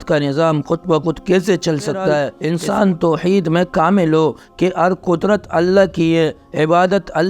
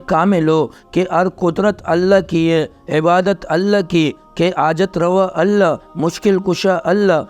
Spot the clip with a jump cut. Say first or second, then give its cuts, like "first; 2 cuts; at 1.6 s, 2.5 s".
first; 1 cut; at 2.4 s